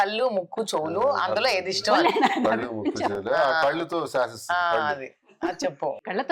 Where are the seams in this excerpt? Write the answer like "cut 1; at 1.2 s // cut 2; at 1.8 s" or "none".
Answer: none